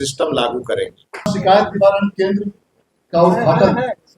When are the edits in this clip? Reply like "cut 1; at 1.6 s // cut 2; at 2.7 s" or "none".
cut 1; at 1.1 s